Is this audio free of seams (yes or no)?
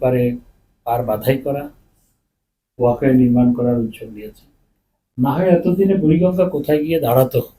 yes